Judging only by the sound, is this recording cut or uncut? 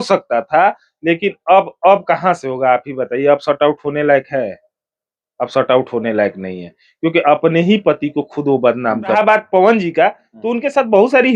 cut